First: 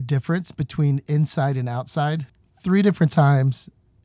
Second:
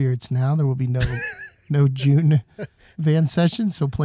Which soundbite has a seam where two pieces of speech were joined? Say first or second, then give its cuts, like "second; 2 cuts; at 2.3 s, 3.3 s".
first; 1 cut; at 2.3 s